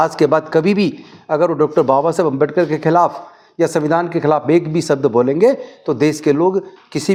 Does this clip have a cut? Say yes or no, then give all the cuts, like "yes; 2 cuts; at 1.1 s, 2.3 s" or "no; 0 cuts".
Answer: no; 0 cuts